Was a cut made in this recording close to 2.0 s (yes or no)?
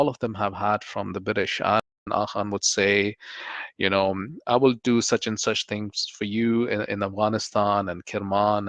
yes